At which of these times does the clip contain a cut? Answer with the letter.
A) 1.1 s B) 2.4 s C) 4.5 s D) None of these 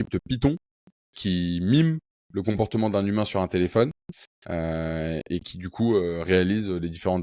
D